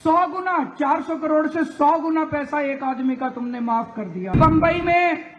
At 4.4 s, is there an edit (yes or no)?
yes